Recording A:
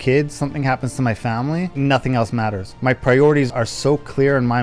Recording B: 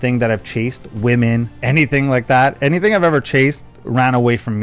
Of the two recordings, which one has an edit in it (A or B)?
A